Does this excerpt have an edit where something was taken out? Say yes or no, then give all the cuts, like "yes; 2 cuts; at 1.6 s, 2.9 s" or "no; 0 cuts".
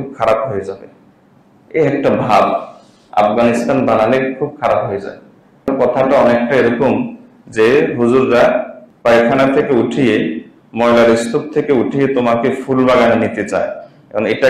yes; 1 cut; at 5.7 s